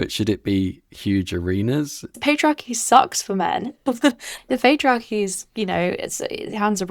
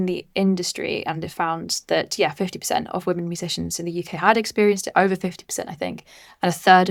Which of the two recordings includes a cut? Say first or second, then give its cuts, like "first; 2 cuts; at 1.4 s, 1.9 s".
first; 2 cuts; at 2.2 s, 4.3 s